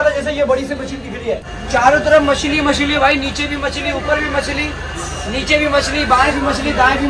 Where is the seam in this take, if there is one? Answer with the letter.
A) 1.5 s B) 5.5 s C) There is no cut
A